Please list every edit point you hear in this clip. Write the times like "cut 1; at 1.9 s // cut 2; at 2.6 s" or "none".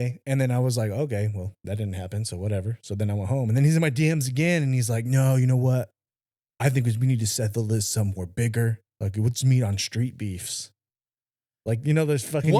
none